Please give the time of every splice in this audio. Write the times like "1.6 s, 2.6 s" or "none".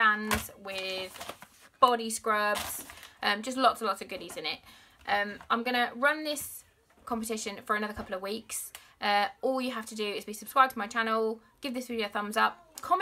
12.1 s